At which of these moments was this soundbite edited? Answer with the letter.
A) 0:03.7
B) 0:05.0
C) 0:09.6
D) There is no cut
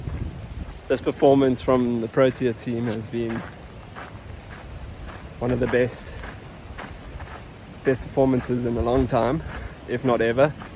D